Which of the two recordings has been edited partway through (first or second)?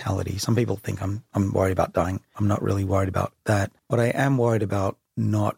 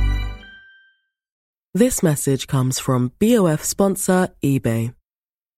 first